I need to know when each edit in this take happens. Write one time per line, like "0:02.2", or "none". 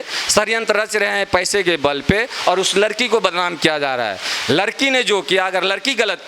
none

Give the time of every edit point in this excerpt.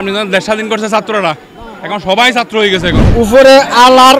0:03.1

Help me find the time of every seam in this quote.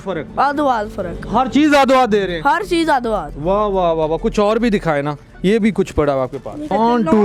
none

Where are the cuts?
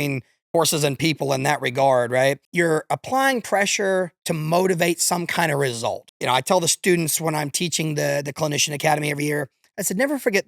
0:02.4
0:06.1

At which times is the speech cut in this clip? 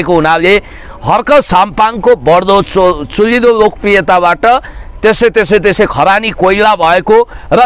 none

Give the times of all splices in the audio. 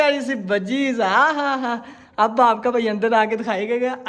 none

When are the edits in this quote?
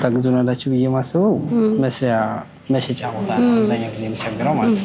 none

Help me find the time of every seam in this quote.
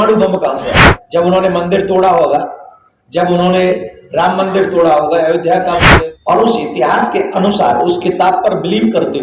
0:00.9
0:05.9

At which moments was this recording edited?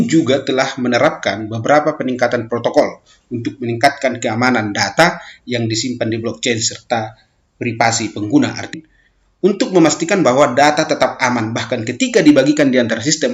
0:08.7

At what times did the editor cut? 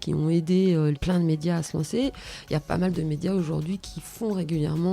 0:01.0

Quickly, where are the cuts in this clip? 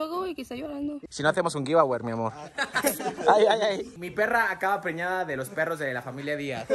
0:01.0
0:04.0

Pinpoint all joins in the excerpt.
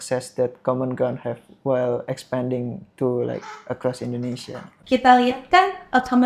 0:04.7

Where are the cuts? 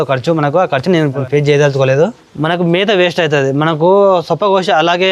0:01.1
0:02.1

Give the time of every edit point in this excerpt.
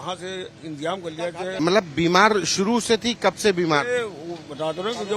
0:01.5

